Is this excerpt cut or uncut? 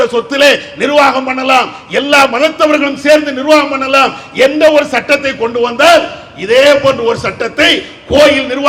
uncut